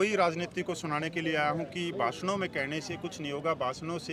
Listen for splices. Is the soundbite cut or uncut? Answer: uncut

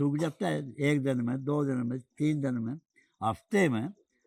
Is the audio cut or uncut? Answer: uncut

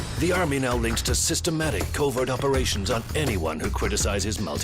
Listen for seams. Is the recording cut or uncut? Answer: cut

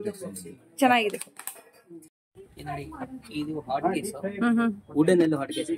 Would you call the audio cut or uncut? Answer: uncut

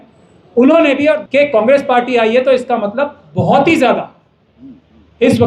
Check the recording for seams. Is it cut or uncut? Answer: cut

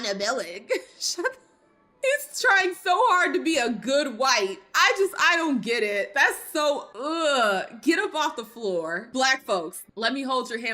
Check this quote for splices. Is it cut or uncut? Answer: cut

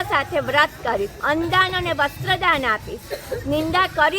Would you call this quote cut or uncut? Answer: cut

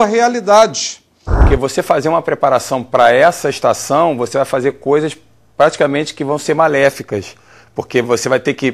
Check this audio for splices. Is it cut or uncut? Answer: cut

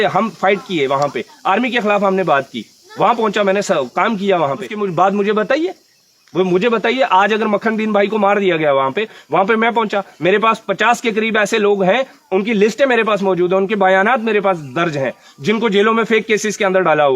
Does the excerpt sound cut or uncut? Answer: cut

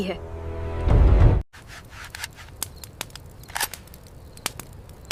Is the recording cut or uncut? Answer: uncut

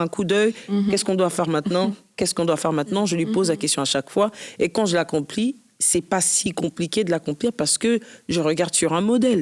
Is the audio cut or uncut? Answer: uncut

